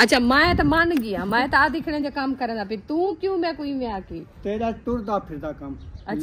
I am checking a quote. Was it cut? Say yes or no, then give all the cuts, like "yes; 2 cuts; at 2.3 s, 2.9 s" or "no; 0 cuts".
yes; 1 cut; at 3.1 s